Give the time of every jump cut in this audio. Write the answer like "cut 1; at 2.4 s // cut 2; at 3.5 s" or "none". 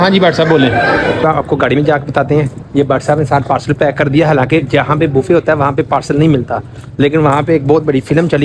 cut 1; at 1.2 s